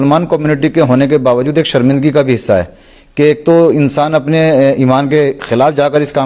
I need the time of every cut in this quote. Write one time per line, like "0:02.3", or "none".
none